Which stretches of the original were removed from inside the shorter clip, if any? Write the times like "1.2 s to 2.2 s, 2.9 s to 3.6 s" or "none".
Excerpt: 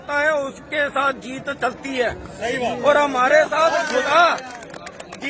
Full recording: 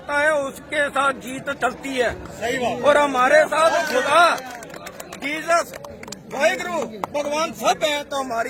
none